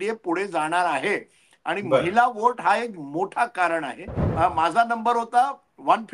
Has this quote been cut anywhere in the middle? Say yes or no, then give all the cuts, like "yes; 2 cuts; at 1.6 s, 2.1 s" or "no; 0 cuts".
yes; 1 cut; at 4.2 s